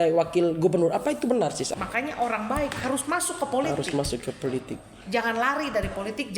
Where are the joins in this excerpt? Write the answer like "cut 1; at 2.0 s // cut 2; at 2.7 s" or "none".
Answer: cut 1; at 1.7 s